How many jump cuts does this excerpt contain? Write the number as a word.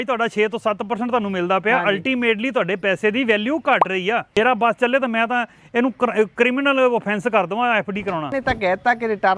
two